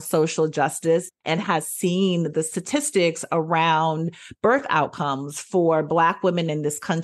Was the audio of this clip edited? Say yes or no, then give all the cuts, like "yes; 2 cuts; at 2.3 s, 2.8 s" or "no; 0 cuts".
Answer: no; 0 cuts